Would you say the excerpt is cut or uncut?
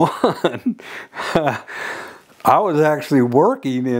uncut